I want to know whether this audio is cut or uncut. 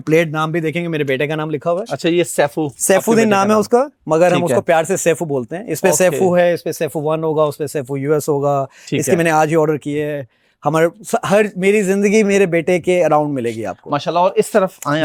uncut